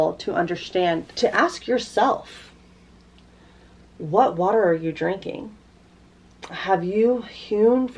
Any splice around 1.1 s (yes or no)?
yes